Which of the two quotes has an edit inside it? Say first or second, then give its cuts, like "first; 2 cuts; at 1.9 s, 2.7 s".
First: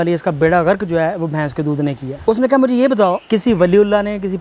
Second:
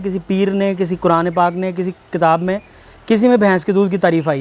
first; 2 cuts; at 2.1 s, 3.2 s